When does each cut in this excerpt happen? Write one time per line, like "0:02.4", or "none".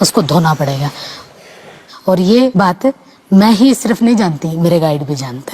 none